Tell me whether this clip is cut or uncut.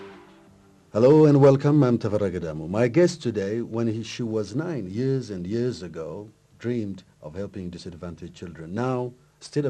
uncut